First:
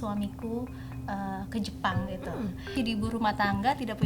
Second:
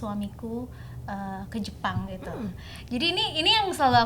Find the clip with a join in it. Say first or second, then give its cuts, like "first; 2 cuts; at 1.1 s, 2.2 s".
first; 1 cut; at 2.8 s